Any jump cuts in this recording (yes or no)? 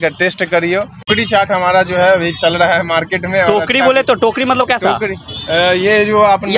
yes